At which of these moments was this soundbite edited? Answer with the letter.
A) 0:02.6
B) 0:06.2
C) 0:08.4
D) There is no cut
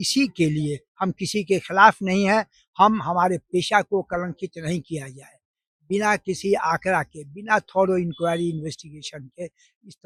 D